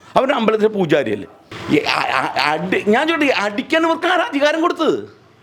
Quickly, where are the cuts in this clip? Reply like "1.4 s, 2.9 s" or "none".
1.5 s